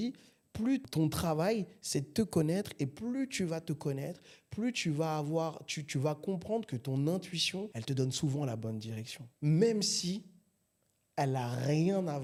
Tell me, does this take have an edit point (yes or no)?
no